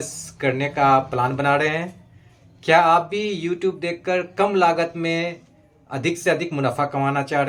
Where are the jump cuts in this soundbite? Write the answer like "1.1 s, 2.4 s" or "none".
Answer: none